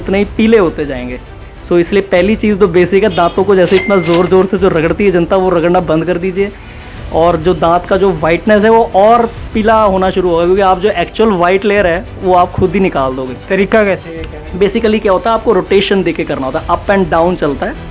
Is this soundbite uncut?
yes; 0 cuts

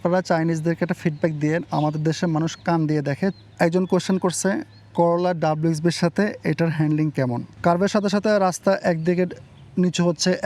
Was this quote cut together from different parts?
yes; 2 cuts; at 3.3 s, 7.5 s

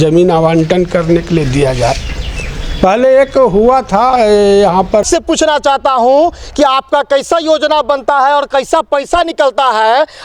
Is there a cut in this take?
yes; 1 cut; at 5.0 s

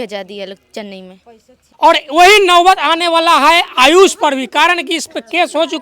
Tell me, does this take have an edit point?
yes; 1 cut; at 1.6 s

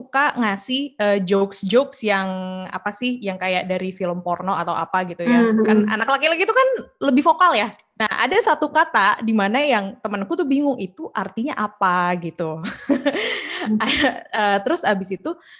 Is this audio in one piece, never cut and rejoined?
no; 1 cut; at 7.7 s

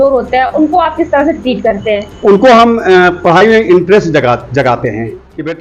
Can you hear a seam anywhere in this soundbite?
no; 0 cuts

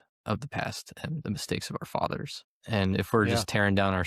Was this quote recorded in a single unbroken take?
no; 1 cut; at 2.5 s

